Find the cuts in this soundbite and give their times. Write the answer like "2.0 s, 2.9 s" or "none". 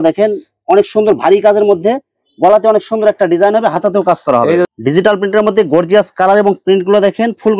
4.6 s